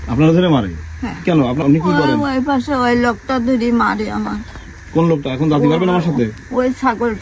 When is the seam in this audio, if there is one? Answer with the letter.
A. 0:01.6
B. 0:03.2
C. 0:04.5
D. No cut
A